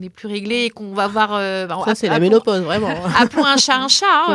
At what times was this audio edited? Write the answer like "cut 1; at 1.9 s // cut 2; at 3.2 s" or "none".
none

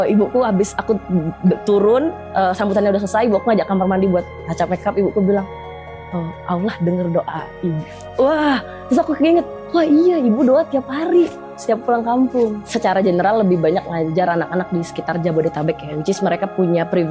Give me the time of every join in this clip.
cut 1; at 12.6 s // cut 2; at 16.0 s

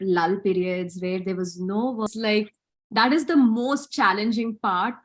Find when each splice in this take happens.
cut 1; at 2.1 s

